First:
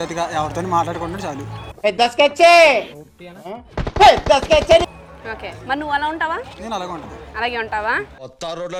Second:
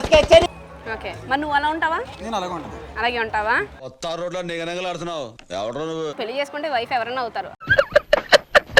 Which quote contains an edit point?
second; 1 cut; at 6.1 s

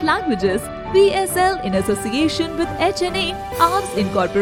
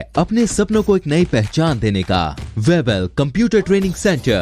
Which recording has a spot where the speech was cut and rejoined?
second; 1 cut; at 2.4 s

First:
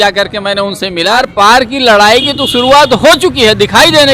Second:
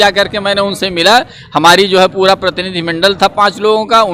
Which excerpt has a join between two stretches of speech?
first; 1 cut; at 1.2 s

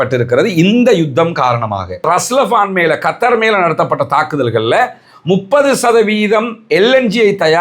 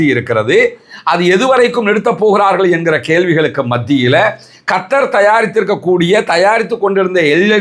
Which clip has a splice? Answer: first; 1 cut; at 2.0 s

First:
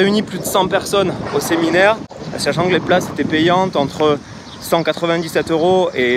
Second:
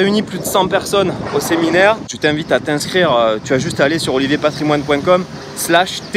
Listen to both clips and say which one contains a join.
second; 1 cut; at 2.1 s

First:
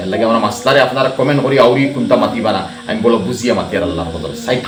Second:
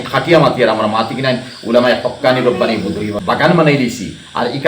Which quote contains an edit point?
second; 1 cut; at 3.2 s

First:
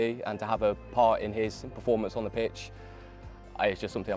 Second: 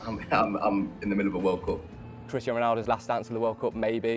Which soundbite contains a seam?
second; 1 cut; at 2.2 s

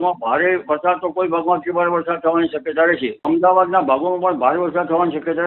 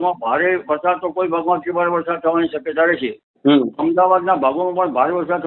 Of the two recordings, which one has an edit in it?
first; 1 cut; at 3.2 s

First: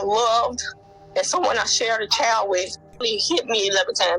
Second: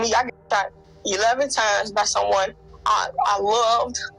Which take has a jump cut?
first; 1 cut; at 3.0 s

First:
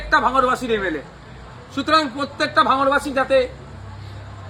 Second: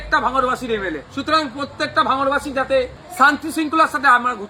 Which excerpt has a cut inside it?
second; 2 cuts; at 1.0 s, 3.0 s

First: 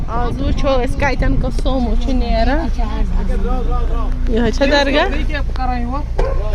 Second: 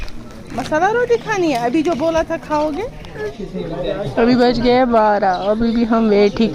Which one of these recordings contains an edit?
second; 1 cut; at 3.4 s

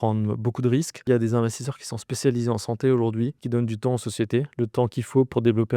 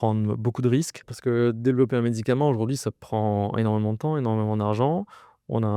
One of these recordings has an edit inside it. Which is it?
first; 2 cuts; at 1.0 s, 3.4 s

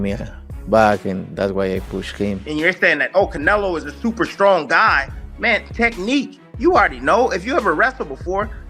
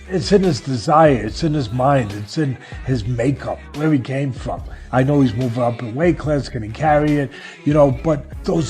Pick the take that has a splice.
first; 1 cut; at 2.4 s

